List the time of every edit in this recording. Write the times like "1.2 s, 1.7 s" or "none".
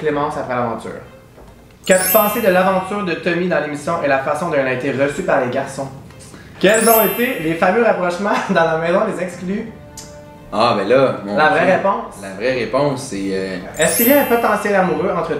1.8 s, 6.4 s, 13.7 s